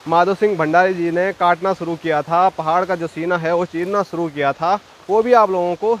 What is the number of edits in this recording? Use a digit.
0